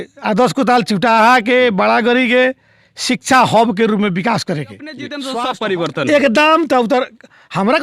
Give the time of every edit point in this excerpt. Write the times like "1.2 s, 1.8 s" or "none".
5.2 s